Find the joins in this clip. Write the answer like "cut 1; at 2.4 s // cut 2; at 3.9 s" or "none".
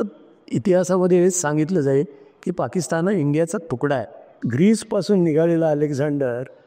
cut 1; at 4.4 s